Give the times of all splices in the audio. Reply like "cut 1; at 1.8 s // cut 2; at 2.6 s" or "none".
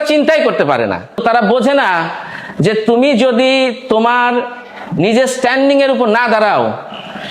cut 1; at 1.2 s